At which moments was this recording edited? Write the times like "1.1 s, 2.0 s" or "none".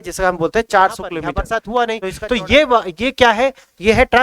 1.3 s